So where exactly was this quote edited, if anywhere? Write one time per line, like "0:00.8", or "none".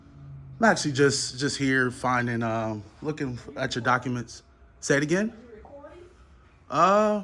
none